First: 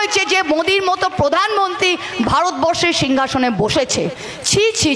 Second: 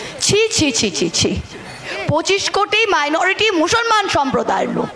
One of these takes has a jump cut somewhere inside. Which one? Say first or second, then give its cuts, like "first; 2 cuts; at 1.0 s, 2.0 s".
second; 1 cut; at 1.9 s